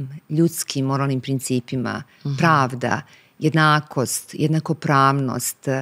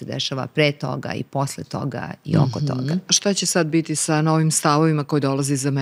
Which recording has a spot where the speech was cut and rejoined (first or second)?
second